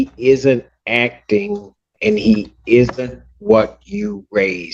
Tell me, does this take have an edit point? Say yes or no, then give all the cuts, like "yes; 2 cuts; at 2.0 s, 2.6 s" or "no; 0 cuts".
no; 0 cuts